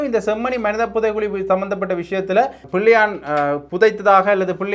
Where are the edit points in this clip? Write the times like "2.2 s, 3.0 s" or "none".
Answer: 2.7 s